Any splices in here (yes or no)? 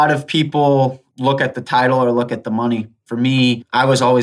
yes